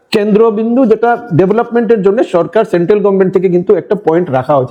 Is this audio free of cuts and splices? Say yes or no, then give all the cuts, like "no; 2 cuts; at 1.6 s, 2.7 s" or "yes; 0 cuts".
yes; 0 cuts